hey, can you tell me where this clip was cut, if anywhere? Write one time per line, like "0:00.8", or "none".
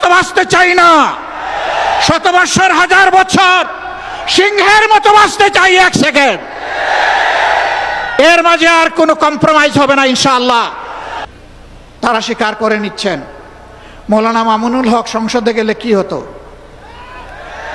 0:11.2